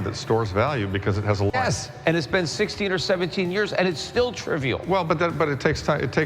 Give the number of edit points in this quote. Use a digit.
1